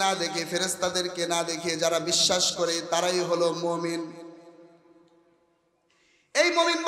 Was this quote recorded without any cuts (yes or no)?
yes